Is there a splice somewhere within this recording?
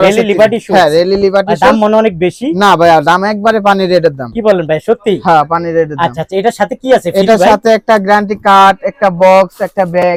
no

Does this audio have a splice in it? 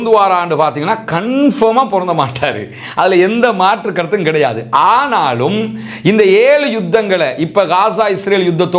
no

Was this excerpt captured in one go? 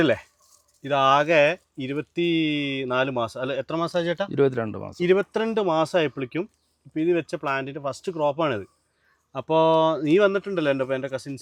yes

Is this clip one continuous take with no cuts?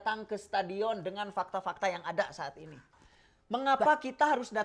no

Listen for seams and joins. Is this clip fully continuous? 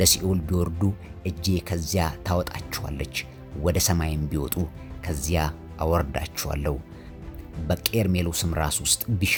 yes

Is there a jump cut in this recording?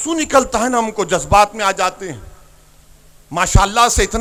no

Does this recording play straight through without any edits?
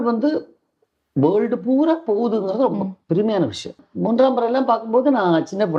no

